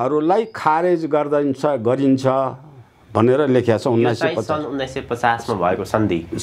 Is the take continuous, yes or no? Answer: yes